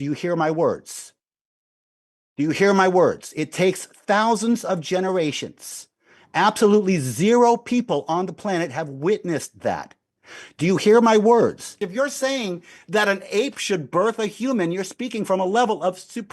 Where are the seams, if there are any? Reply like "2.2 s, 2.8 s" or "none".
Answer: 11.8 s